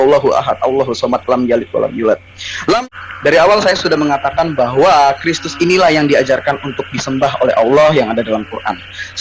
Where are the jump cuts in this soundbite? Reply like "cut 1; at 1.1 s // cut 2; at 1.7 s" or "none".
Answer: cut 1; at 2.8 s